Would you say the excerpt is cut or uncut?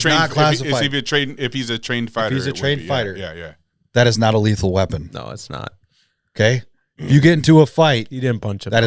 uncut